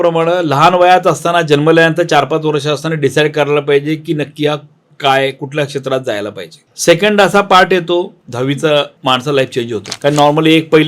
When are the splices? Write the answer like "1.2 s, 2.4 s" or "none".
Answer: 6.7 s, 8.9 s